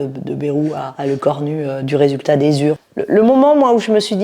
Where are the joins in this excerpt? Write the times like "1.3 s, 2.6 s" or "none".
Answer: 2.8 s